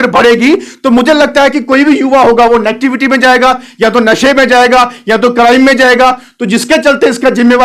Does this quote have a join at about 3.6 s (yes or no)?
no